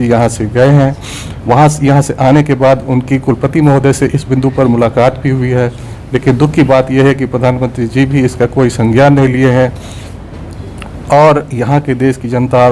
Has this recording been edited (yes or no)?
no